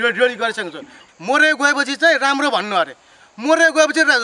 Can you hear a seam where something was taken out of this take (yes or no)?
yes